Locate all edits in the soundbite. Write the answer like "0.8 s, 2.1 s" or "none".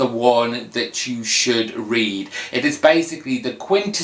none

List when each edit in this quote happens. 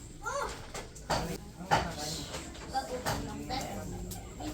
1.3 s

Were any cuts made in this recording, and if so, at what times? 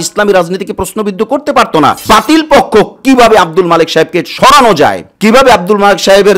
2.0 s, 5.1 s

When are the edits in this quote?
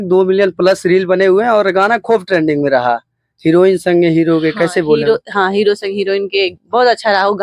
none

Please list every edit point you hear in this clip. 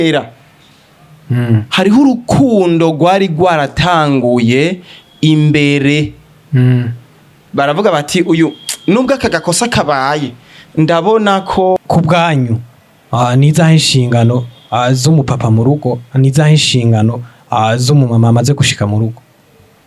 11.8 s

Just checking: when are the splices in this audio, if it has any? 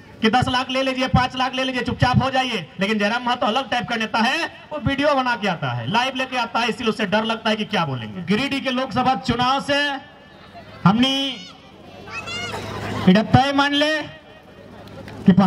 8.2 s

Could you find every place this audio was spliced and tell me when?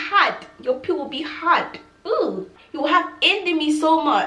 2.6 s

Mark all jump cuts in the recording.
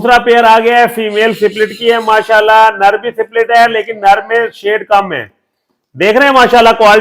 none

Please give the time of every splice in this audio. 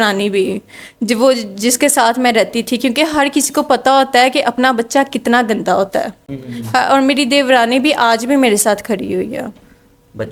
none

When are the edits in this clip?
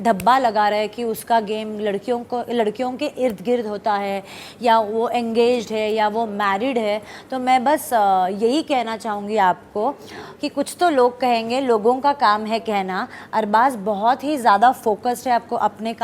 none

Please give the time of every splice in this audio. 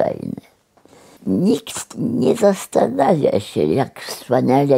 1.1 s

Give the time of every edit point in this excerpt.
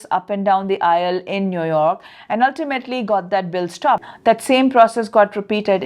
4.1 s

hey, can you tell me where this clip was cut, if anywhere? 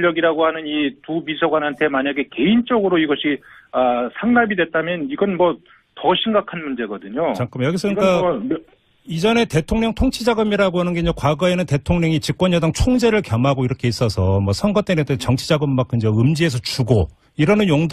10.2 s

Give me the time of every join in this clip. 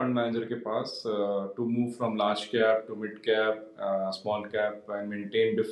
none

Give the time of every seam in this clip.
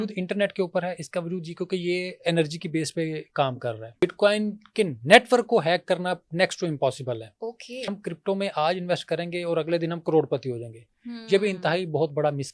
4.0 s, 7.9 s

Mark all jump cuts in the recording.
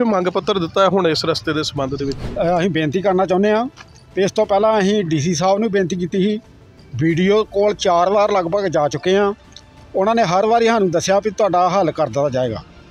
none

